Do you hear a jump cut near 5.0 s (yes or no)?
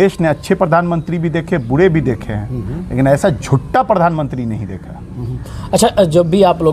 no